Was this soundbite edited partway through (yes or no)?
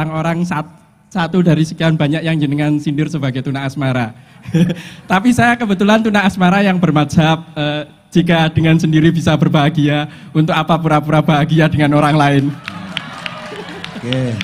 no